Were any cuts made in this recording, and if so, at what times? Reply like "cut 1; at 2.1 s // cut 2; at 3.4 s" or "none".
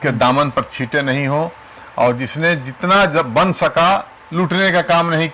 none